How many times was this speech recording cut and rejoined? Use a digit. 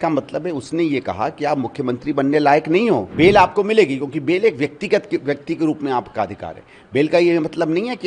1